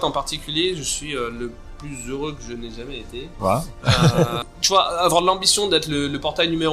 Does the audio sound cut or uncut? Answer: cut